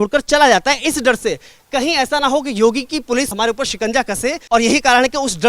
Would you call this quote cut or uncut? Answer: cut